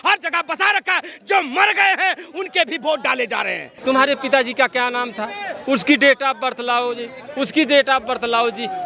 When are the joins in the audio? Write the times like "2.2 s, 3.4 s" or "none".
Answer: 3.6 s